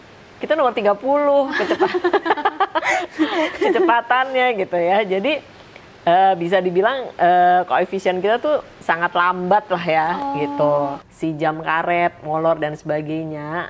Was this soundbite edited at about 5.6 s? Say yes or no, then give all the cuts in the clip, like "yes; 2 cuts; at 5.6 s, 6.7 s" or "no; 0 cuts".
no; 1 cut; at 11.1 s